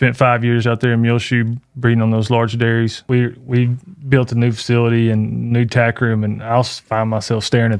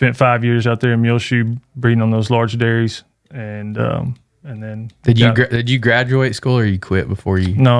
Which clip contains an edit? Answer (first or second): first